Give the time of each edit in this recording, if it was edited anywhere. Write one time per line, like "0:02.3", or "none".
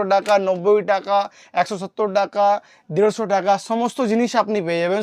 none